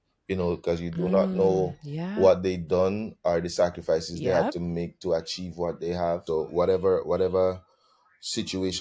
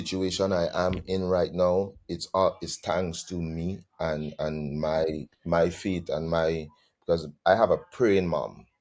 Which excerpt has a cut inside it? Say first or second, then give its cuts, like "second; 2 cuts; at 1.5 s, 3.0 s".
first; 1 cut; at 6.2 s